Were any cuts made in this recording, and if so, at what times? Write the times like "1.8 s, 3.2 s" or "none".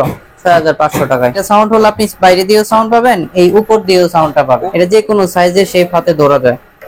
1.4 s, 4.5 s